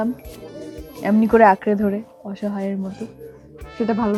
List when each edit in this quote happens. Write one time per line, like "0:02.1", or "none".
none